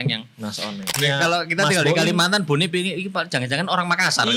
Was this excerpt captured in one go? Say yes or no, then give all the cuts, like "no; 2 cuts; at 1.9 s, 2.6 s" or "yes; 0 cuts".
no; 1 cut; at 1.0 s